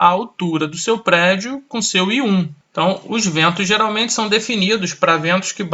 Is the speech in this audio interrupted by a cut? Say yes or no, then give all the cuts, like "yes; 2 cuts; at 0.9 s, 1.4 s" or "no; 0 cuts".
yes; 1 cut; at 2.6 s